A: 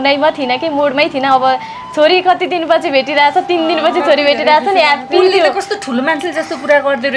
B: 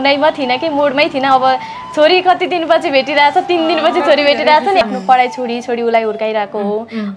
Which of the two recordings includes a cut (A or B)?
B